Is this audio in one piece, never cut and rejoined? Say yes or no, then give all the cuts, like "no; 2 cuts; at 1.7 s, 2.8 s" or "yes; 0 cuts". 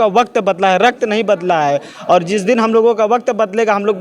yes; 0 cuts